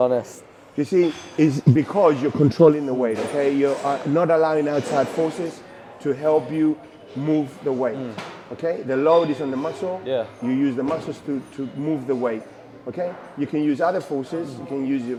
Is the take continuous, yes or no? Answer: yes